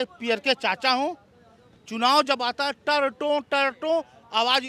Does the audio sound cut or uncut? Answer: uncut